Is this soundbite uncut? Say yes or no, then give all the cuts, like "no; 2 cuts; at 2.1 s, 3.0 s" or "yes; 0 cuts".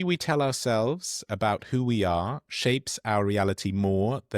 yes; 0 cuts